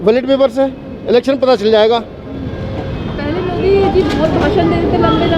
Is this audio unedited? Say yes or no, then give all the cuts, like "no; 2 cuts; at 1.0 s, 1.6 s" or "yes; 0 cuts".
yes; 0 cuts